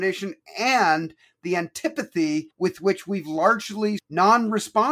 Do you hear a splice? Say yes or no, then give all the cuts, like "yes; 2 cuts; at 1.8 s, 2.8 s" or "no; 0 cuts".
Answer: yes; 2 cuts; at 2.5 s, 4.0 s